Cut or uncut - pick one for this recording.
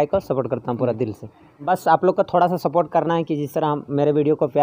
cut